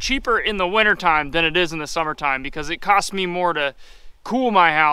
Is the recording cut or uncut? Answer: uncut